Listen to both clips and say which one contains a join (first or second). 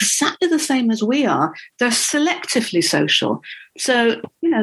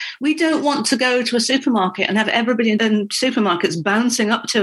second